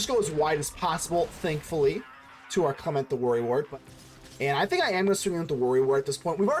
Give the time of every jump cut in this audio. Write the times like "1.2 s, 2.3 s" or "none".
3.7 s